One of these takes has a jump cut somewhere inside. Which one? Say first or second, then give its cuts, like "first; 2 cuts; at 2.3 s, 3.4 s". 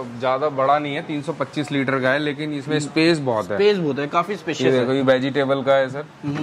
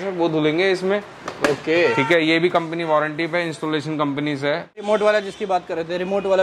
second; 1 cut; at 4.8 s